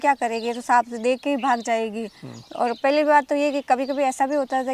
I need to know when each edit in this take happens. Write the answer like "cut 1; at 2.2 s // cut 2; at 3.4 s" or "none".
none